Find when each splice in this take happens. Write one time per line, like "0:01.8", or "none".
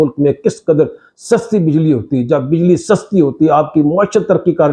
none